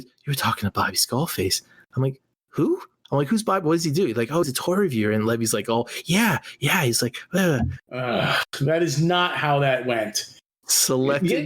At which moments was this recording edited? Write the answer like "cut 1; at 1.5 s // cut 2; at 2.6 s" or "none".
cut 1; at 2.9 s